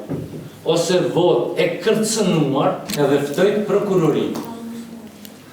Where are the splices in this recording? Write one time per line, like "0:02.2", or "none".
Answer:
0:02.8